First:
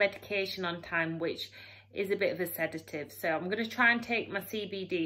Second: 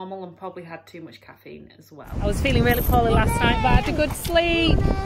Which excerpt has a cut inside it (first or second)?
second